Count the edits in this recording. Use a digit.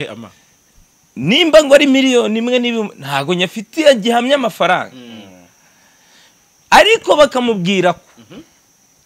0